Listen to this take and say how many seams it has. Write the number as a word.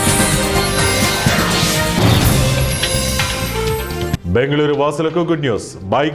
one